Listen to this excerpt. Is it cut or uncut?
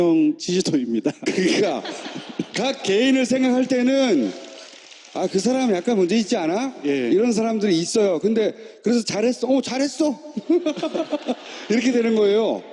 cut